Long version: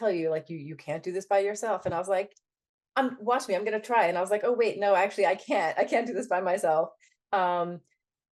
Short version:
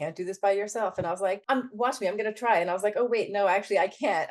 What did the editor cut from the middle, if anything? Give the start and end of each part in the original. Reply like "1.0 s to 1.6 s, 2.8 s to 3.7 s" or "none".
2.3 s to 2.9 s

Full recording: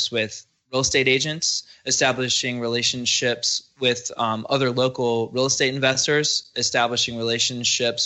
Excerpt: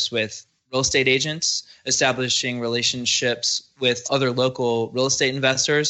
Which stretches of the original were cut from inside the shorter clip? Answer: 4.0 s to 4.4 s

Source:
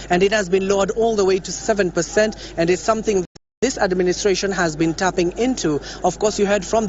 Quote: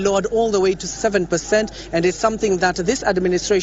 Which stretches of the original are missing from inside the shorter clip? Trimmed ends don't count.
3.4 s to 3.5 s

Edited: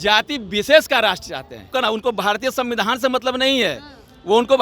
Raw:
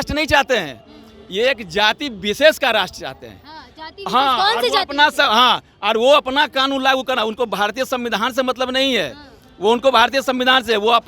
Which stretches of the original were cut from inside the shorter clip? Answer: 3.4 s to 7.0 s

